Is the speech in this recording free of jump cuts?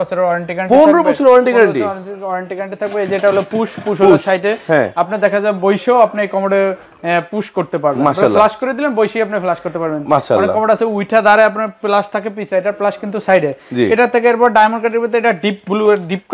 yes; 0 cuts

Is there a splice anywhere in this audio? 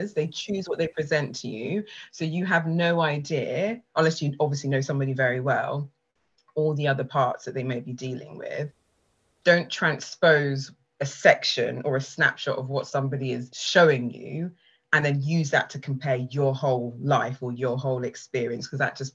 no; 0 cuts

